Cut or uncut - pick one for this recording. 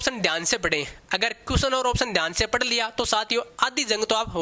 uncut